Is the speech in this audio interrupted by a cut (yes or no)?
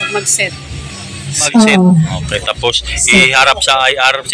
yes